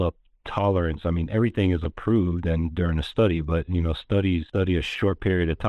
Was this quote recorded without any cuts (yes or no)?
no